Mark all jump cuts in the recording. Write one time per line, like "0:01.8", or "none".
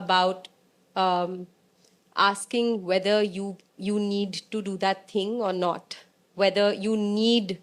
none